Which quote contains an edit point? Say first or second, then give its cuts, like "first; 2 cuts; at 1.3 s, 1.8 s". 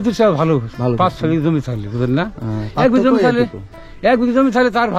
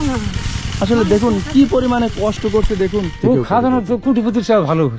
second; 1 cut; at 3.3 s